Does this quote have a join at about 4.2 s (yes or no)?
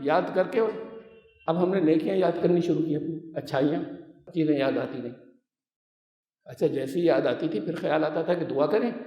yes